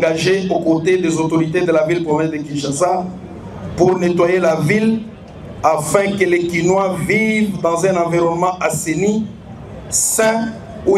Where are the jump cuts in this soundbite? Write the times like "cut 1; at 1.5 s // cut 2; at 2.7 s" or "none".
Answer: none